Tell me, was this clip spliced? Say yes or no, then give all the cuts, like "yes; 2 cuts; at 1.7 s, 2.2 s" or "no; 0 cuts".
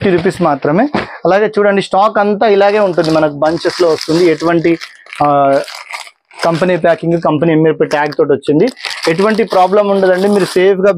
no; 0 cuts